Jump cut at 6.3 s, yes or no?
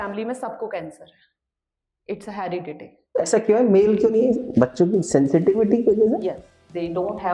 no